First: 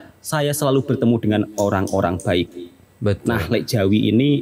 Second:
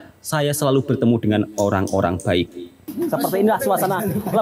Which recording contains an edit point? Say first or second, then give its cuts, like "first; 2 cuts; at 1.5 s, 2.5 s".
second; 1 cut; at 2.8 s